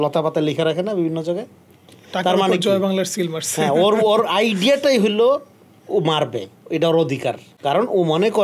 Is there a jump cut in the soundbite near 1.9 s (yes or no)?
no